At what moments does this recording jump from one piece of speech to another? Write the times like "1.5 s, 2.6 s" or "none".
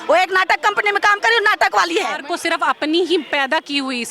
2.2 s